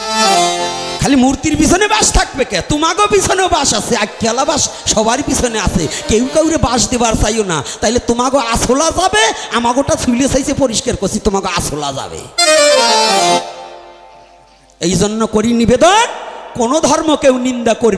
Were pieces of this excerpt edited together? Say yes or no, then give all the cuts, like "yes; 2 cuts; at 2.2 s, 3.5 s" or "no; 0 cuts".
no; 0 cuts